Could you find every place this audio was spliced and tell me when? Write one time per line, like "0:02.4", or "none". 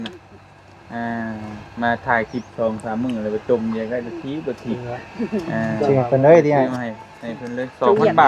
none